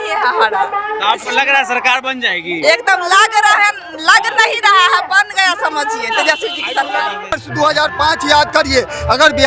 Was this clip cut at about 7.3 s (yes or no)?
yes